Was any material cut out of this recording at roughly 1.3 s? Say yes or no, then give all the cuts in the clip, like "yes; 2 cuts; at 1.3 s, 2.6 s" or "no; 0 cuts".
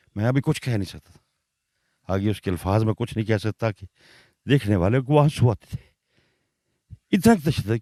no; 0 cuts